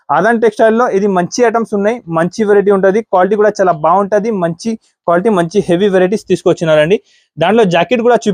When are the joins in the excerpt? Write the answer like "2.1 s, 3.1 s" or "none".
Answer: none